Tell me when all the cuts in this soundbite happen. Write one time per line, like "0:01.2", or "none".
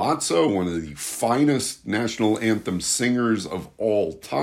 none